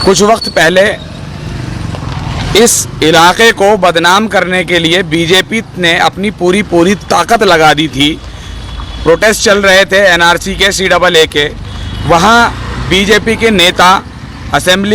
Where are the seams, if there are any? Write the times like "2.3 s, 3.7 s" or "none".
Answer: 1.5 s